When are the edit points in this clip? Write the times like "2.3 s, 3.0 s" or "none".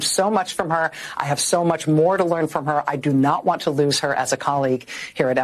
none